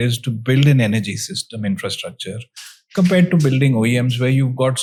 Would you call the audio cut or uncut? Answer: uncut